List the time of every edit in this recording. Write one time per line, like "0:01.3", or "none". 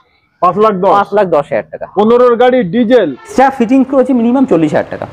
0:03.3